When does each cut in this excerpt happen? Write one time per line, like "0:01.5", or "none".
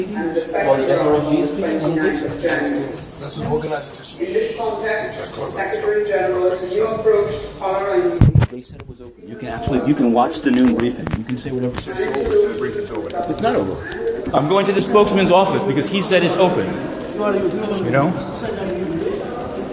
0:14.3